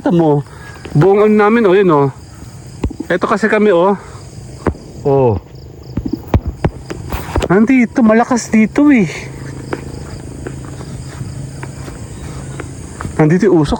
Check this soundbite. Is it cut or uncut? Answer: uncut